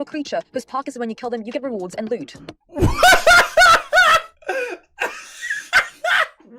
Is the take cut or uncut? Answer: uncut